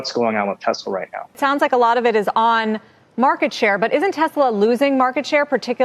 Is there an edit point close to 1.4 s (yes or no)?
yes